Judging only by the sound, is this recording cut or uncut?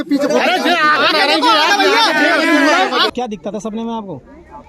cut